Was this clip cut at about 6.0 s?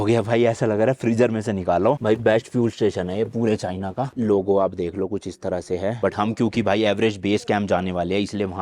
yes; 2 cuts; at 2.0 s, 6.0 s

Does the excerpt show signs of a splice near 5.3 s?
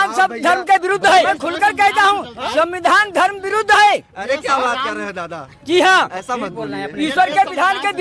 no; 1 cut; at 1.2 s

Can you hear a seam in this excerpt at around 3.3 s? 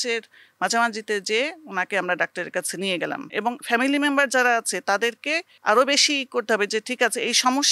yes; 2 cuts; at 3.3 s, 5.5 s

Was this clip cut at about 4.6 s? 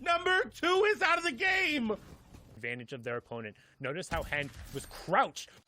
no; 1 cut; at 2.5 s

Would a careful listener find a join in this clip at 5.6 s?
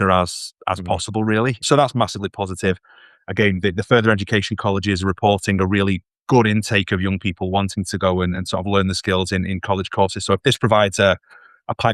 no; 1 cut; at 1.6 s

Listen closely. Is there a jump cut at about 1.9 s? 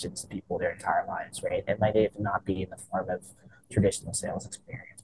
no; 0 cuts

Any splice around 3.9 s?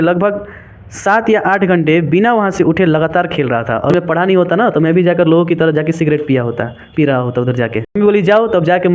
yes; 2 cuts; at 3.9 s, 8.0 s

